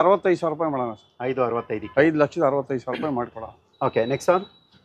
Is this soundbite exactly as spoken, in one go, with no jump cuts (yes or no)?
yes